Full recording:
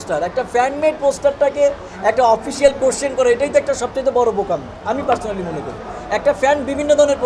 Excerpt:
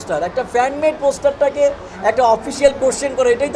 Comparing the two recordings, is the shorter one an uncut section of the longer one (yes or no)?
yes